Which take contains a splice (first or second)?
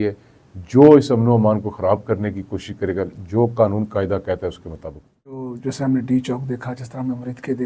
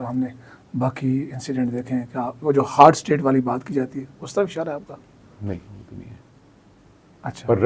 first